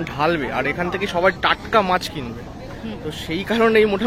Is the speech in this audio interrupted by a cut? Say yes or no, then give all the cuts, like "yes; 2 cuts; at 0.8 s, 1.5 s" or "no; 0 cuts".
no; 0 cuts